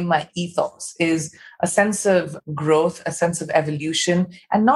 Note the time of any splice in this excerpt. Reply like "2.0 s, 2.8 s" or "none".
none